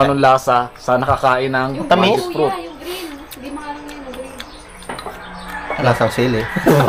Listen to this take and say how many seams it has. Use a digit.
0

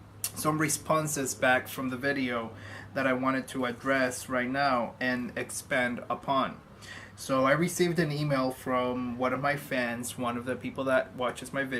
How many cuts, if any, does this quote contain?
1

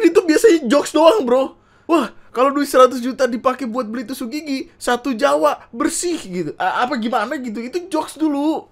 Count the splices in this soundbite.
0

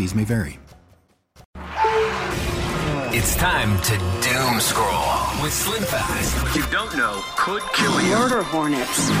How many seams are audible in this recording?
1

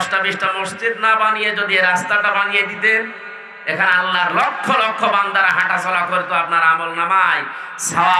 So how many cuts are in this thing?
0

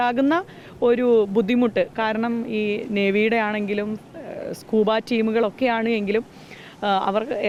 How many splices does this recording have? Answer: 0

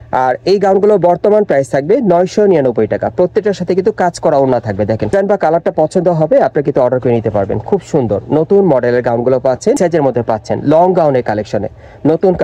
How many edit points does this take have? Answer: 2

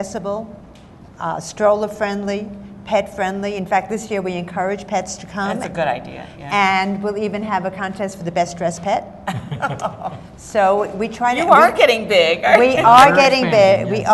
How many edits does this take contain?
1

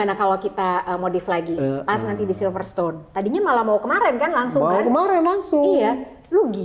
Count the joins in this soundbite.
0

